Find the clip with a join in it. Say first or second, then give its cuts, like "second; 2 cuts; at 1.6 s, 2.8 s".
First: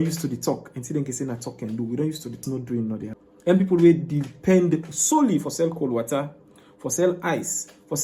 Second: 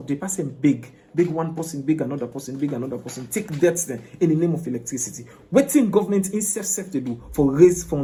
first; 2 cuts; at 2.4 s, 3.3 s